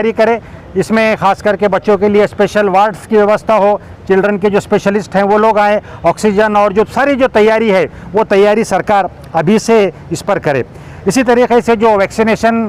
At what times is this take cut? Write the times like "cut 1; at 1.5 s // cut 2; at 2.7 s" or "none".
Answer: none